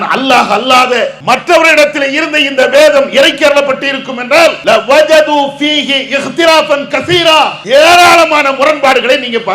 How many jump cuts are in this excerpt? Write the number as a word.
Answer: three